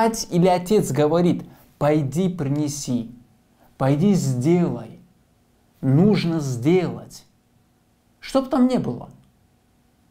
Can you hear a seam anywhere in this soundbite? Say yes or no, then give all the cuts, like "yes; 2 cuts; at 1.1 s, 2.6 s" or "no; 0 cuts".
no; 0 cuts